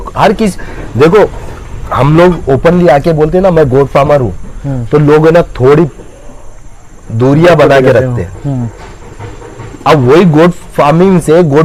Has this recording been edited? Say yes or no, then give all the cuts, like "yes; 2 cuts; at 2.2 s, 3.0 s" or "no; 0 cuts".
no; 0 cuts